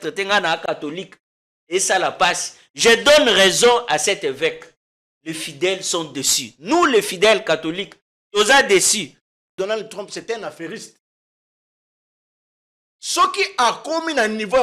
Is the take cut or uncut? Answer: cut